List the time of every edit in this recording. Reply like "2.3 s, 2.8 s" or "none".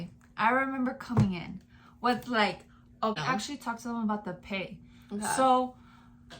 3.2 s